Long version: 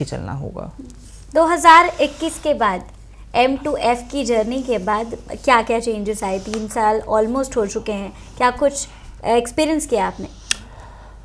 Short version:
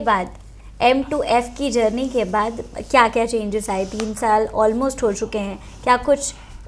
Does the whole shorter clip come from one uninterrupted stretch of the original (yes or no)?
yes